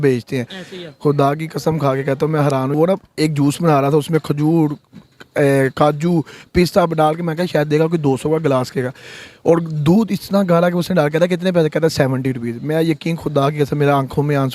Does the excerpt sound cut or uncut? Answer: cut